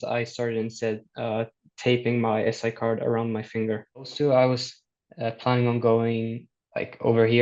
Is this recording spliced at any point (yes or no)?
yes